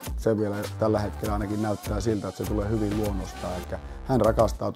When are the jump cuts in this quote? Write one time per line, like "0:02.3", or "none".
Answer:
none